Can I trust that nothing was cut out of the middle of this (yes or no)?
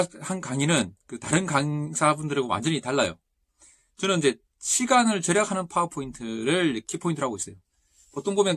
yes